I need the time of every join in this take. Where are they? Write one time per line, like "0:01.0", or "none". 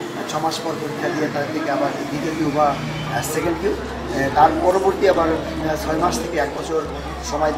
none